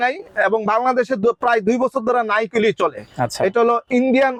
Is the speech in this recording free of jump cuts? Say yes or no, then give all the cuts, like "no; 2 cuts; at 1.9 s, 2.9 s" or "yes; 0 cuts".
yes; 0 cuts